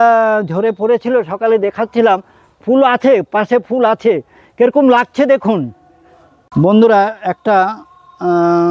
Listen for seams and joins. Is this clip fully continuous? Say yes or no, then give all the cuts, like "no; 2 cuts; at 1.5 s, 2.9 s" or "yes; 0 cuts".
no; 1 cut; at 6.4 s